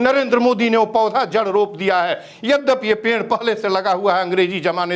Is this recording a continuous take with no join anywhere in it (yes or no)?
yes